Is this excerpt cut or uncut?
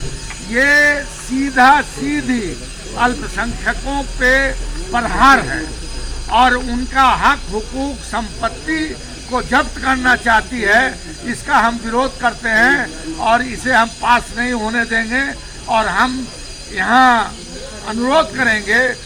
uncut